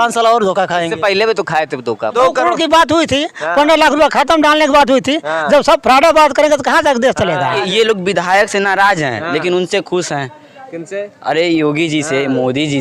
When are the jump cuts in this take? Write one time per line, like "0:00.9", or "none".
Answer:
0:02.1
0:07.6